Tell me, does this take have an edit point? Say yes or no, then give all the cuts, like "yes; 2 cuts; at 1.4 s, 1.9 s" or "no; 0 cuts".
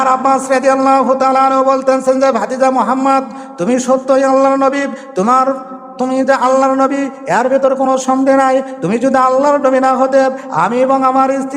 no; 0 cuts